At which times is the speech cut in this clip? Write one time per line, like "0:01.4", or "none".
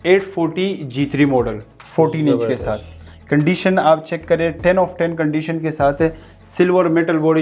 none